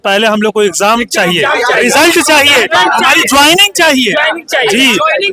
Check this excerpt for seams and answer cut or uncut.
uncut